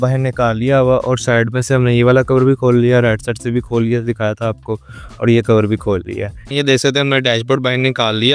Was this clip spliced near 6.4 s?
yes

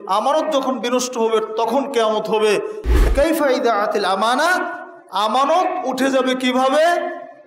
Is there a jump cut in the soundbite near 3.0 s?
yes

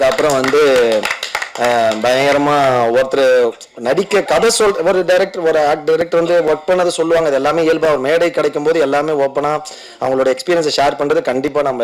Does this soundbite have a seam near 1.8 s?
no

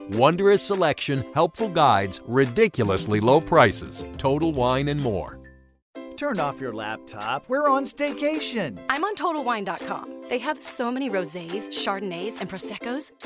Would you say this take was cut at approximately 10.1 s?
no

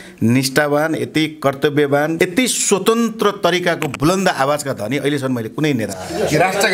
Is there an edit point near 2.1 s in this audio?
yes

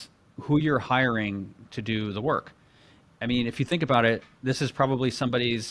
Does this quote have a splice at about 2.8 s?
no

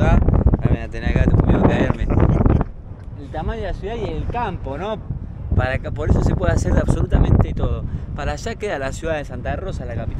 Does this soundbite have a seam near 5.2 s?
no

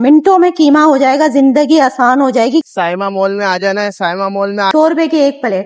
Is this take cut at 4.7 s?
yes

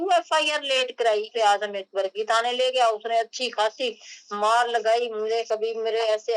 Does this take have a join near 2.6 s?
no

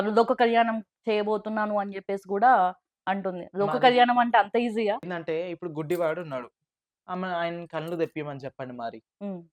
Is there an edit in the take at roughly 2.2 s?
no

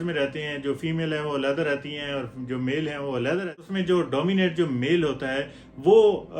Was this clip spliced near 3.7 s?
yes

